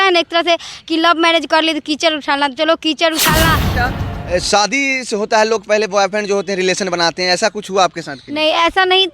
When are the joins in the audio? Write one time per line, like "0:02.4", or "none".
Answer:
0:03.6